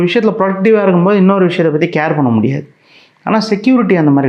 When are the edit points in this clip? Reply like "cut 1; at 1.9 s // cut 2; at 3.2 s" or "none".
none